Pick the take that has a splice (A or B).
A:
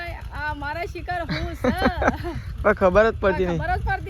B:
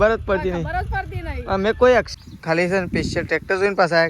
B